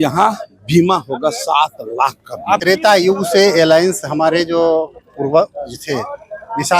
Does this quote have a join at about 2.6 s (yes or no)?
yes